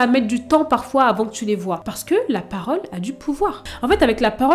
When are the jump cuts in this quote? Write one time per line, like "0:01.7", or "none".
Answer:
0:01.8
0:03.7